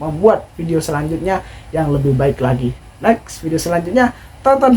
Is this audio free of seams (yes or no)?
no